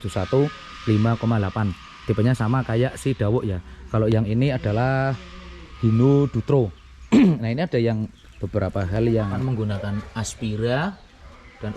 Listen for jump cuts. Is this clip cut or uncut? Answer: cut